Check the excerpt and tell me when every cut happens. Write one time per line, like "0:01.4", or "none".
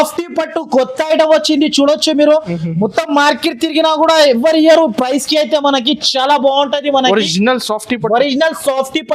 none